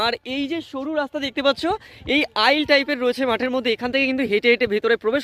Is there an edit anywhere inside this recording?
no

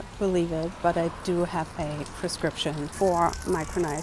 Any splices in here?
yes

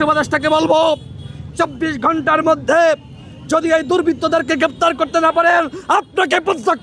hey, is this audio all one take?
yes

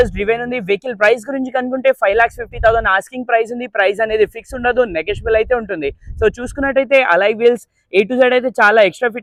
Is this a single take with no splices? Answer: yes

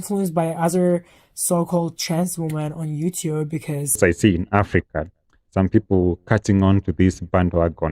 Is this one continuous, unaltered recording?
no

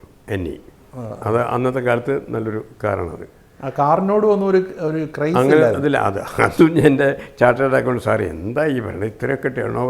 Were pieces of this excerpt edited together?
no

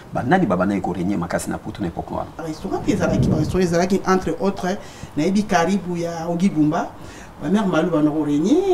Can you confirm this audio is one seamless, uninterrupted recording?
no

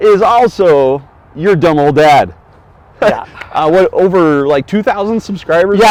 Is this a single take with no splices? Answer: yes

